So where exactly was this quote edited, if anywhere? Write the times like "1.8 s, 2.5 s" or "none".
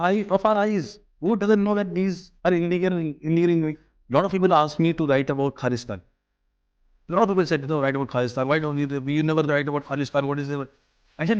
3.9 s